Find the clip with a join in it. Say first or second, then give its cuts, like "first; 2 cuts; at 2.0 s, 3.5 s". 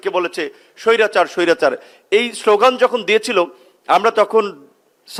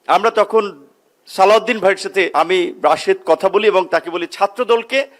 second; 1 cut; at 2.3 s